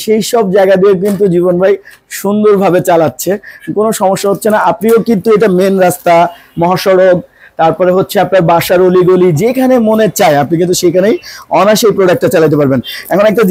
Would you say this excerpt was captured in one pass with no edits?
yes; 0 cuts

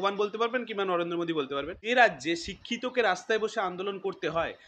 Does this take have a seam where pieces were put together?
yes; 1 cut; at 1.8 s

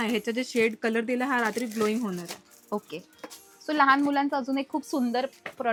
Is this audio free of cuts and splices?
yes; 0 cuts

